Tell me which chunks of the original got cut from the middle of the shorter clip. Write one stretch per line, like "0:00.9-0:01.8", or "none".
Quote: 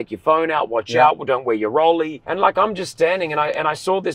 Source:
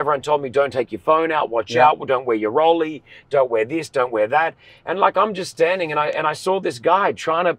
0:03.0-0:04.8